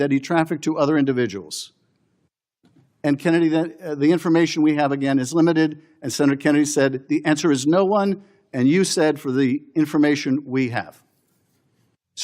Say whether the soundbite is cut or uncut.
uncut